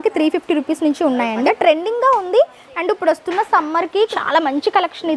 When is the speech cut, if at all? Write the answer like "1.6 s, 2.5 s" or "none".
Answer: 1.4 s, 4.2 s